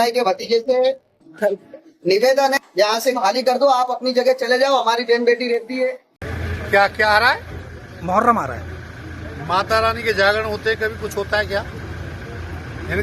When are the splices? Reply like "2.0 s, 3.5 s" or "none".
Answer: 6.1 s